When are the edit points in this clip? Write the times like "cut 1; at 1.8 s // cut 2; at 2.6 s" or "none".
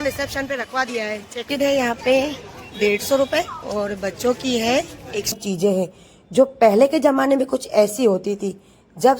cut 1; at 1.5 s // cut 2; at 5.3 s